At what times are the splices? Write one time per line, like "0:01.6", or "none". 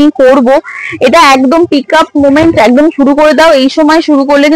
none